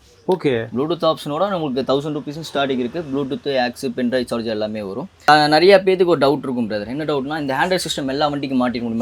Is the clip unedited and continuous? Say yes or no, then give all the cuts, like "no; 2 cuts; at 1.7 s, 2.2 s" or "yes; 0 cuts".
no; 1 cut; at 5.3 s